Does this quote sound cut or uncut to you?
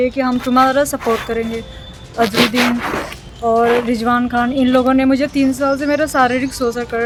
uncut